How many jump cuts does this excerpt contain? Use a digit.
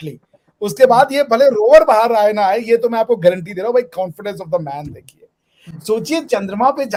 0